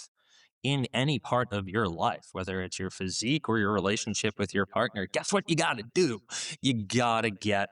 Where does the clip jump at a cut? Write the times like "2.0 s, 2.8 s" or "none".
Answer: none